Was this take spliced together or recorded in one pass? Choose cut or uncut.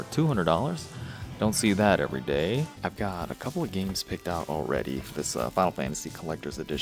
cut